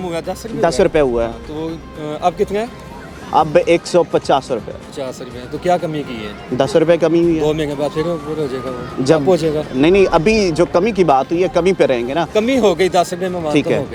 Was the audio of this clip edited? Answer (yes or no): no